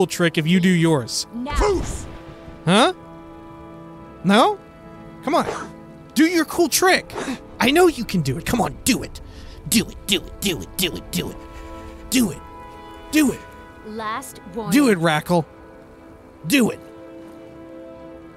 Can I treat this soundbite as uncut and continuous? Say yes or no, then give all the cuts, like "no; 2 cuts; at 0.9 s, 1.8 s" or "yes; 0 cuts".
no; 1 cut; at 1.2 s